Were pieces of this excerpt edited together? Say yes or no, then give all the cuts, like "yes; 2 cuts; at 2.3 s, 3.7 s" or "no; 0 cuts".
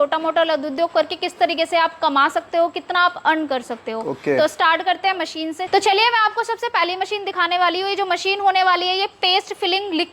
no; 0 cuts